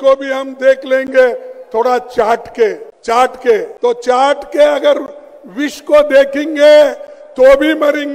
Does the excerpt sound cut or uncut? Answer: cut